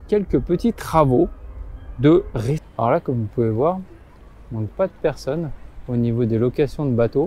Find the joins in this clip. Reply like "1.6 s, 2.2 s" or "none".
2.6 s